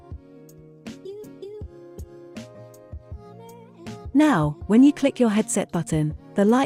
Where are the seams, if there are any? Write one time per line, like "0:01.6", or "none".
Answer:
none